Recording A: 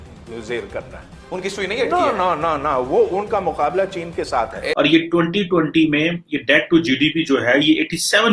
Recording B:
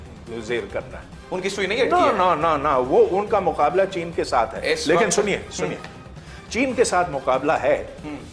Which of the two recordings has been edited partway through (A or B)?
A